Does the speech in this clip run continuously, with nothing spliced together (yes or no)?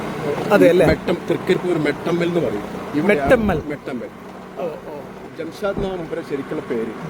yes